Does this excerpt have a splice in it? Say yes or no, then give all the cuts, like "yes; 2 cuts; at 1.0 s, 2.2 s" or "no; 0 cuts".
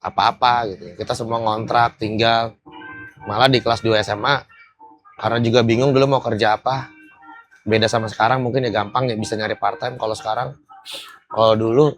no; 0 cuts